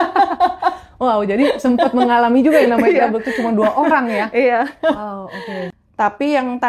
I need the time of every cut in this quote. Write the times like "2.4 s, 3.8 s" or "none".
5.6 s